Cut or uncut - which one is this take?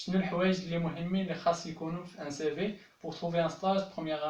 uncut